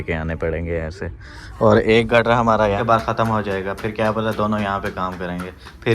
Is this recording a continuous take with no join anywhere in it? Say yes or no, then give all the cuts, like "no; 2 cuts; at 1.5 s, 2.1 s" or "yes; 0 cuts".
no; 1 cut; at 2.8 s